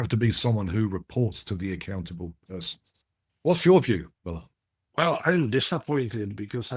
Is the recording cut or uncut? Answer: uncut